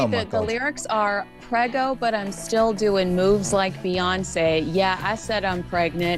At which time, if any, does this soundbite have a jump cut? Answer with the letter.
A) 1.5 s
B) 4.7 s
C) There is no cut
B